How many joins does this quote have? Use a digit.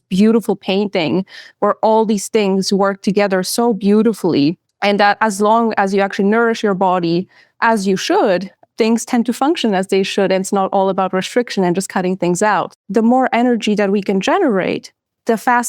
3